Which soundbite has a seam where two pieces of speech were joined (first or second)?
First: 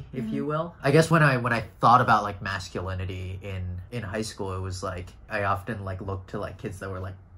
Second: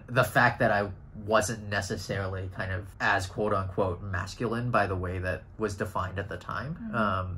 first